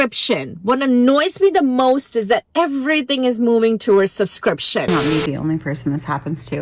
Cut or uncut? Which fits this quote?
cut